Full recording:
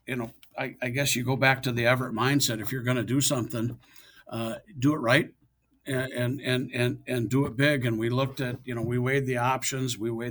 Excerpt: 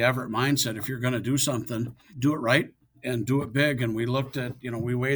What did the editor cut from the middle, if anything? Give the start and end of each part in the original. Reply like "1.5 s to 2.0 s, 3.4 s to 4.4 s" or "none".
3.9 s to 4.7 s, 5.6 s to 7.0 s